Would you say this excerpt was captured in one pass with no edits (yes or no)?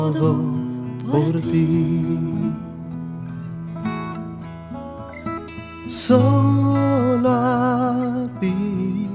yes